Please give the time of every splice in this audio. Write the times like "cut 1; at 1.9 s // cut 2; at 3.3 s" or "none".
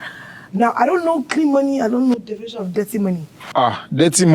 cut 1; at 3.3 s